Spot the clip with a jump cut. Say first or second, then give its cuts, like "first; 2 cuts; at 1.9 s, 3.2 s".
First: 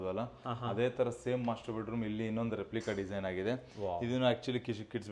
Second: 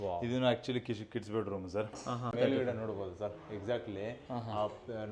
second; 1 cut; at 2.3 s